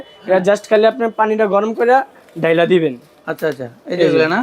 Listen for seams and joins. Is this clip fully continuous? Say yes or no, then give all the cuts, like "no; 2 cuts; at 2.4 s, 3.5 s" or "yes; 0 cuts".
yes; 0 cuts